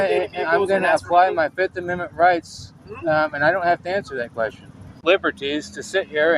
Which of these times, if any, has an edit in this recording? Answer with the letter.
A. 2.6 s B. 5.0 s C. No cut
B